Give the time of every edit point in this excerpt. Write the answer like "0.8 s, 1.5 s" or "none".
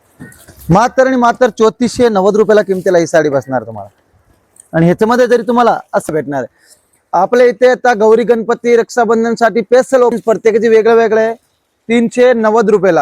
6.1 s, 10.2 s

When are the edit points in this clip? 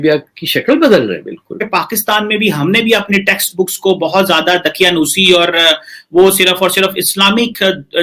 1.7 s

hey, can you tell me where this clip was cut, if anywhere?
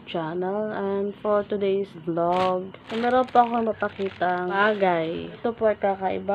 2.0 s, 2.8 s, 4.6 s, 5.4 s

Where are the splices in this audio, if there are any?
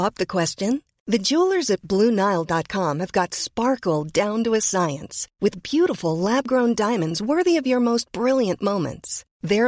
none

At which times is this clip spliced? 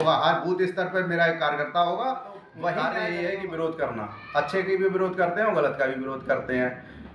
2.9 s

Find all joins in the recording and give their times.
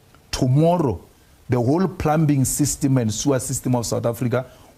none

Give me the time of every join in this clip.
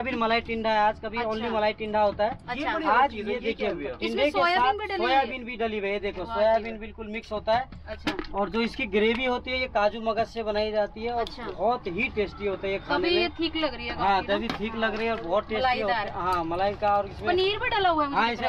none

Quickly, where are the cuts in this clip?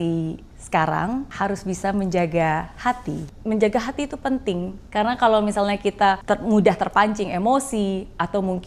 1.3 s, 3.3 s, 4.8 s, 6.2 s

